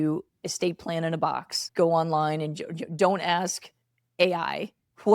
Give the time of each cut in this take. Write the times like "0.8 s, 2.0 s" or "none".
1.6 s

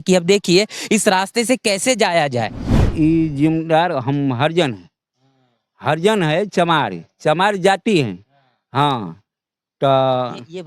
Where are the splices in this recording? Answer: 2.8 s

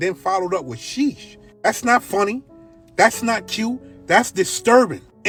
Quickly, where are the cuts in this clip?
none

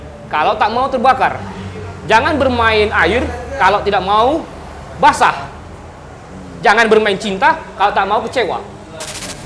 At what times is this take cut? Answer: none

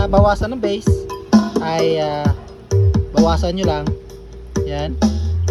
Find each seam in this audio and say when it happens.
none

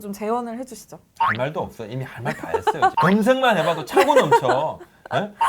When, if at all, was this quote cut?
2.9 s

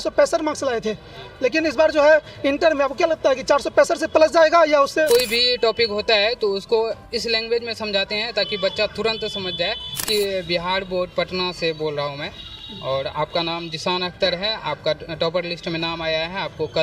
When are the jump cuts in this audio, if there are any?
5.1 s, 10.1 s

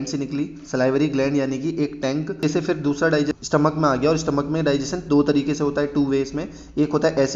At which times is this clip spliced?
2.4 s, 3.4 s

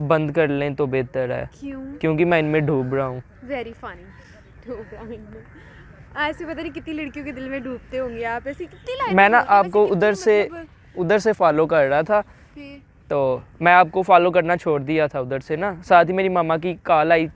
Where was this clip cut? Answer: none

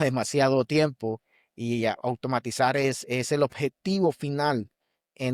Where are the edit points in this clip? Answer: none

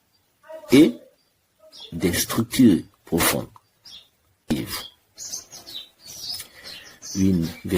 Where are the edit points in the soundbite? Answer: 4.5 s

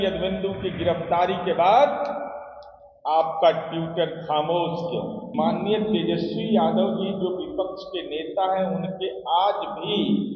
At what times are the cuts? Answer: 5.3 s

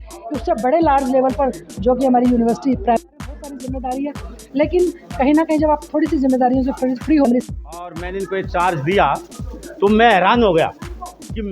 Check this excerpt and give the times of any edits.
3.0 s, 7.2 s

